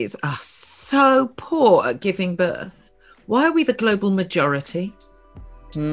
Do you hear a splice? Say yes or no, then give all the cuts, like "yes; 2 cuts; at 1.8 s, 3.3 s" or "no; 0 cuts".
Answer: no; 0 cuts